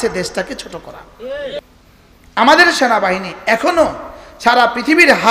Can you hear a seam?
yes; 1 cut; at 1.6 s

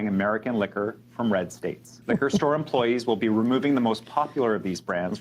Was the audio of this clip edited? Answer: yes; 1 cut; at 1.9 s

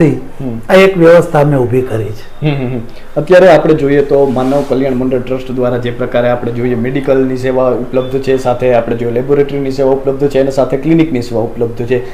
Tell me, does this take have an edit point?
no; 0 cuts

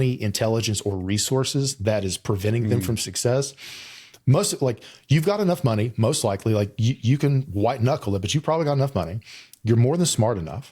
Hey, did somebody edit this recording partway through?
no; 0 cuts

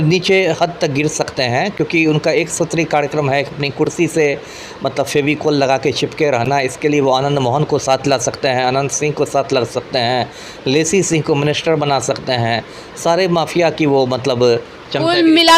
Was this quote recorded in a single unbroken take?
yes; 0 cuts

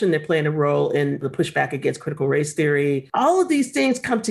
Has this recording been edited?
yes; 1 cut; at 3.1 s

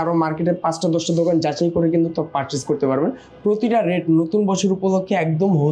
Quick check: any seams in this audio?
no; 0 cuts

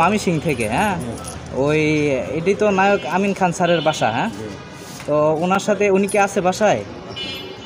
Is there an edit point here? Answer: no; 0 cuts

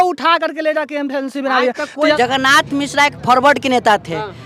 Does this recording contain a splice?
yes; 1 cut; at 2.2 s

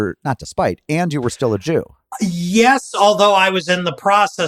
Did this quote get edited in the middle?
yes; 1 cut; at 2.0 s

